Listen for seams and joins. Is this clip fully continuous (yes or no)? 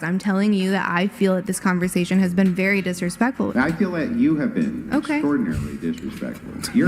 no